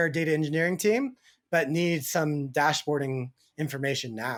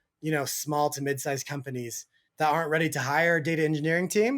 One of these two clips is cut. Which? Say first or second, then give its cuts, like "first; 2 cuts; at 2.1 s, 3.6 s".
second; 1 cut; at 2.2 s